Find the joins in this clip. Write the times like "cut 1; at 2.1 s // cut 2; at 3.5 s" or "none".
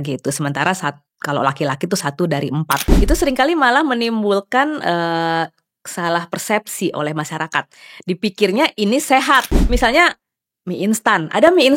cut 1; at 2.9 s // cut 2; at 9.6 s